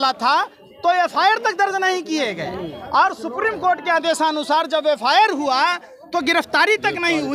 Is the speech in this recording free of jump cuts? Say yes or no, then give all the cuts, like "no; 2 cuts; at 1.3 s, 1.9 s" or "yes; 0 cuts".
yes; 0 cuts